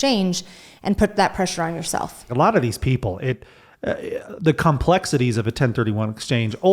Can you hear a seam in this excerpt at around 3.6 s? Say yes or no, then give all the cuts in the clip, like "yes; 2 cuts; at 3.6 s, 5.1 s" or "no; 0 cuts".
no; 1 cut; at 2.2 s